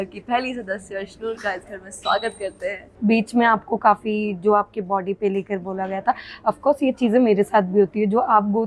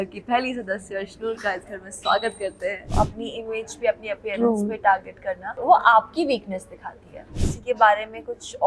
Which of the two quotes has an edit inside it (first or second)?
second